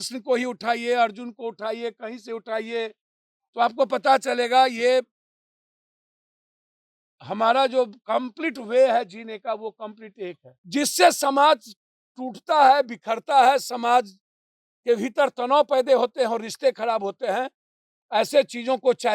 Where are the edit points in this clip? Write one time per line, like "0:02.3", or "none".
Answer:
0:10.5